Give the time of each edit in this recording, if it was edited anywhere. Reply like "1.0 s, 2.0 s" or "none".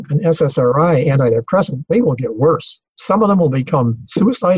none